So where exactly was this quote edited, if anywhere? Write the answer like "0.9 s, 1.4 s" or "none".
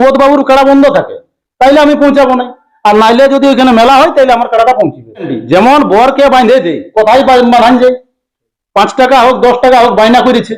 5.3 s